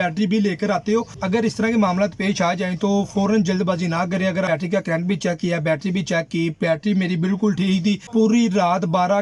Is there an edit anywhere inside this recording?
yes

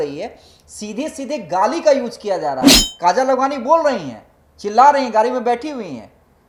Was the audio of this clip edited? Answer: no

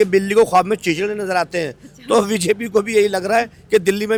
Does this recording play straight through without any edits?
yes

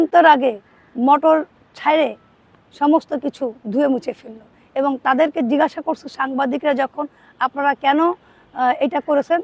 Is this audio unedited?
yes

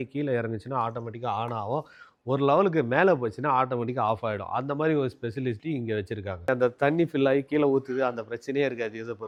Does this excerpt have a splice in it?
no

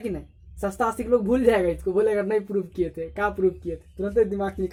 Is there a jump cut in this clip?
no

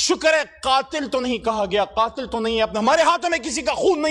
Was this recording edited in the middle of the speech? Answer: no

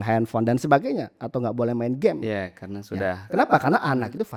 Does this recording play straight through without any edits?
yes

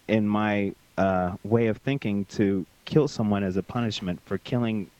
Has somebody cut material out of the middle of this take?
no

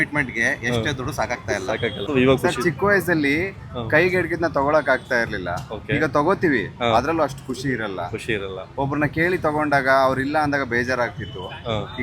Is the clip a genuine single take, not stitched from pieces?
no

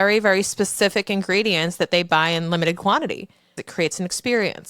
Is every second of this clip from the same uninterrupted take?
no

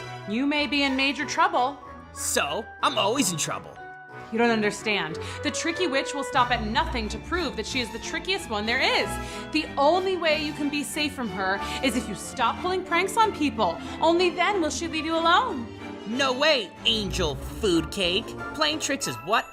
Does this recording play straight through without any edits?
yes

